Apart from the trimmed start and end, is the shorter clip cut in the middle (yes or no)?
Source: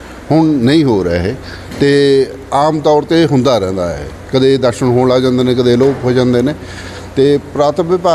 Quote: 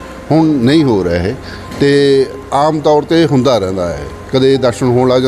no